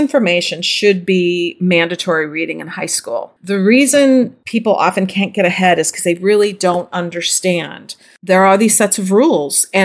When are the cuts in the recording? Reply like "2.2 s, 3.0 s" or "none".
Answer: 3.3 s, 4.4 s